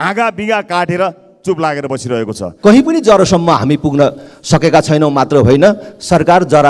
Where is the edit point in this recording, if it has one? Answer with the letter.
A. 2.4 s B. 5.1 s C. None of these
A